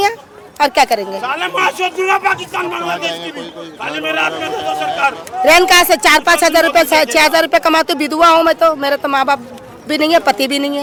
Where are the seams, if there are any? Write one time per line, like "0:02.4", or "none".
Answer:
none

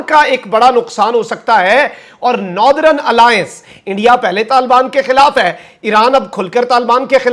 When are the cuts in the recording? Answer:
none

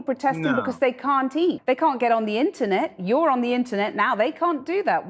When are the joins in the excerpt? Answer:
0:01.6

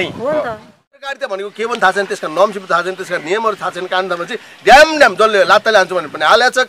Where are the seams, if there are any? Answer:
0:01.2

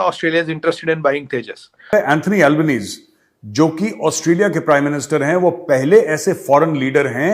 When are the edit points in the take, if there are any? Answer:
0:01.9

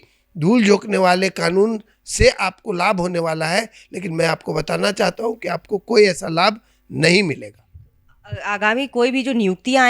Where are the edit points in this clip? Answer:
none

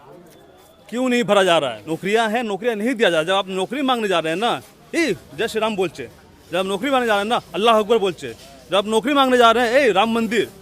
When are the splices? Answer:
0:01.8

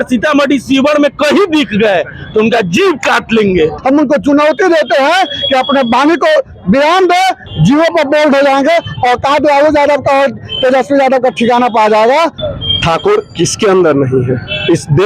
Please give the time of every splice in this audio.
0:03.8
0:07.4
0:12.4

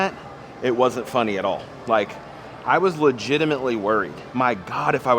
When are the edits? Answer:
0:04.2

